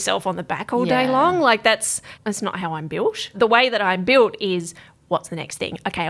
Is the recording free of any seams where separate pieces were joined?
no; 2 cuts; at 2.1 s, 3.3 s

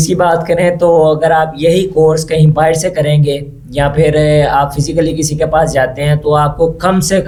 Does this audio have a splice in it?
no; 0 cuts

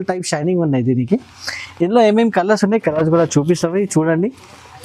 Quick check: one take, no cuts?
yes; 0 cuts

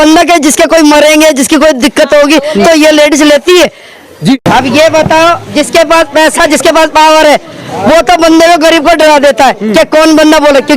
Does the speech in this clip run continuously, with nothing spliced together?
no; 1 cut; at 4.4 s

